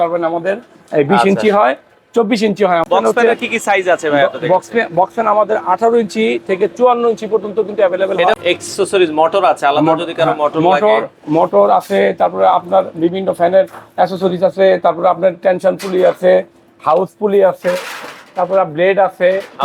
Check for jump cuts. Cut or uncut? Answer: cut